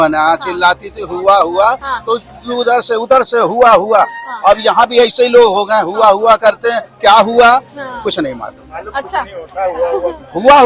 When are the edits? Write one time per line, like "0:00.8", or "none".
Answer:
none